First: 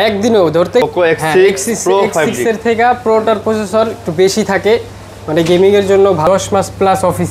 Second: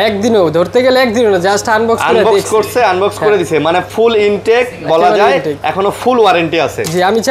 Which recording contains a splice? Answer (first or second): first